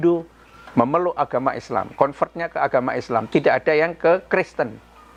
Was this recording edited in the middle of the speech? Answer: no; 0 cuts

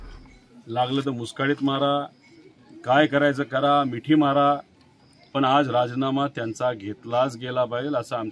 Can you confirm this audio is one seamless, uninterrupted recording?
yes; 0 cuts

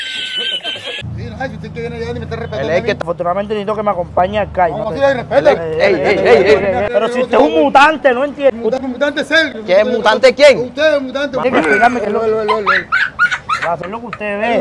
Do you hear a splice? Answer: yes; 5 cuts; at 3.0 s, 6.8 s, 8.8 s, 11.4 s, 13.8 s

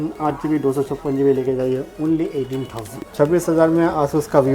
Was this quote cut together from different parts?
yes; 1 cut; at 3.0 s

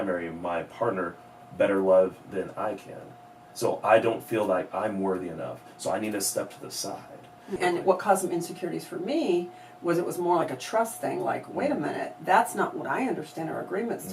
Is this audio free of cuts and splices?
no; 1 cut; at 7.5 s

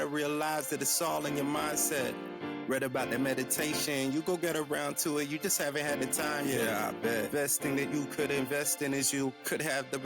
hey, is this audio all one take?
yes; 0 cuts

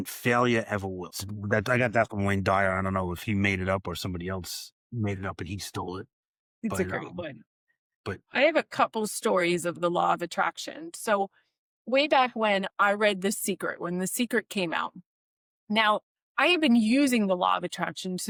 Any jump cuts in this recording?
no; 0 cuts

